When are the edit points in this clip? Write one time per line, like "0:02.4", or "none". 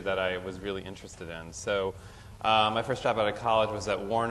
0:01.5